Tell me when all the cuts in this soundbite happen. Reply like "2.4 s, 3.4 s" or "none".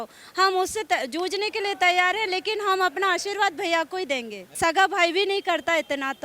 4.5 s